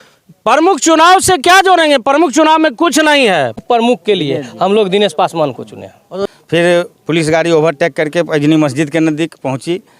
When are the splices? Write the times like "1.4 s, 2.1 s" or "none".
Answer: 3.6 s, 6.2 s